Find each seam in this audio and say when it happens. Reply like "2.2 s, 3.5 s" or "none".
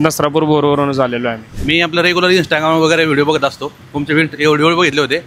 1.5 s

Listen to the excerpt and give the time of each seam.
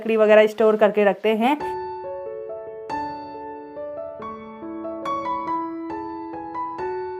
none

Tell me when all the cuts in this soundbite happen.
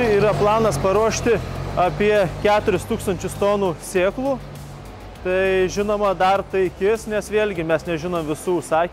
none

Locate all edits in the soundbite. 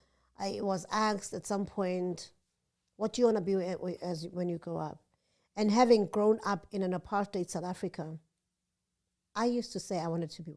none

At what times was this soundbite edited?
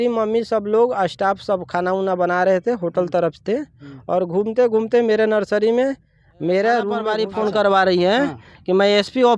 7.2 s

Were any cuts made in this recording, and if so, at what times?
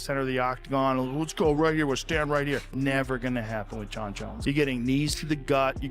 2.7 s, 4.3 s

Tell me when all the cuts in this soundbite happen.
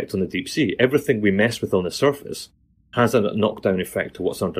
none

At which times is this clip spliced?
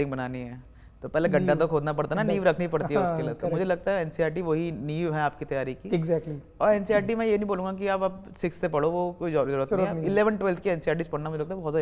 none

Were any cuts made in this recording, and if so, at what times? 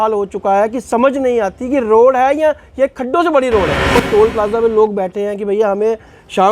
4.0 s

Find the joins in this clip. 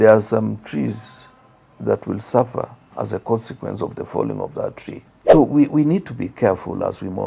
5.3 s

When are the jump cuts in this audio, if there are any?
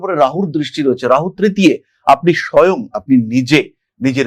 none

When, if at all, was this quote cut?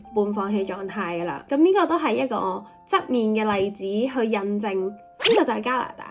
1.4 s

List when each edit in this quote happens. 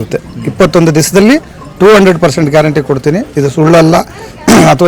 none

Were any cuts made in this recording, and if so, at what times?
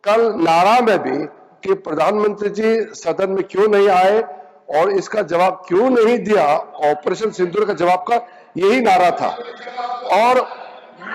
none

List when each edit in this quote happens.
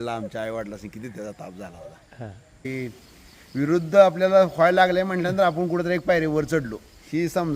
2.6 s

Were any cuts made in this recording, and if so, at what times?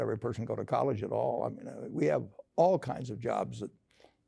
none

